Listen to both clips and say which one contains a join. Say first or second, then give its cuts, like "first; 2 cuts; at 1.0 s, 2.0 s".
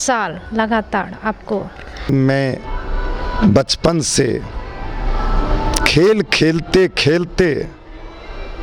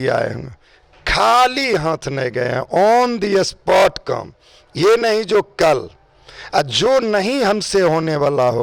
first; 1 cut; at 2.1 s